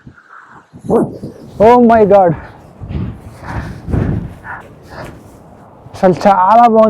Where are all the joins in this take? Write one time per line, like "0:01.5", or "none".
0:01.3
0:04.6